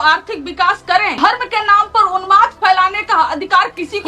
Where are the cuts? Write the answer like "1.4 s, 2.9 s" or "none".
1.1 s